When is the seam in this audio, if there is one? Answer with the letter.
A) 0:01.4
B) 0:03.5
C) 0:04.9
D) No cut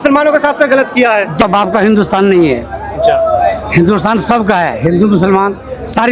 A